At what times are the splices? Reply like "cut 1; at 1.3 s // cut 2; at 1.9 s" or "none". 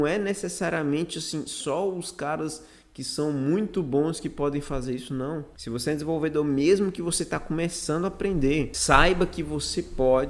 cut 1; at 5.5 s // cut 2; at 8.8 s